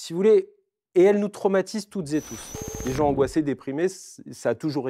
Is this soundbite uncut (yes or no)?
no